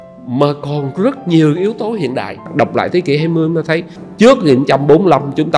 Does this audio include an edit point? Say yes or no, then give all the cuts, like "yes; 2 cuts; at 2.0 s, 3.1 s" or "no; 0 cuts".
yes; 2 cuts; at 2.4 s, 4.0 s